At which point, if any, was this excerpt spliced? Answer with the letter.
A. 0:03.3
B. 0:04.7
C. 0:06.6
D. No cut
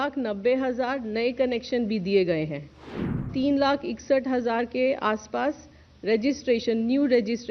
A